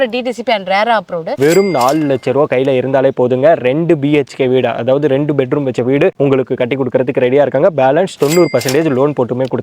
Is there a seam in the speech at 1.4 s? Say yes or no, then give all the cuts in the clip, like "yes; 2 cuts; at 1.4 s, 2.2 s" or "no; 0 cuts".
yes; 1 cut; at 1.4 s